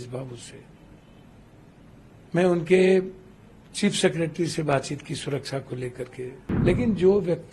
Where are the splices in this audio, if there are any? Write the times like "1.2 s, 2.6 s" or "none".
6.4 s

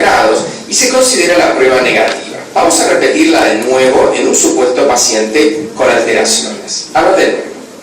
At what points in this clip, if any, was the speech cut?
3.4 s

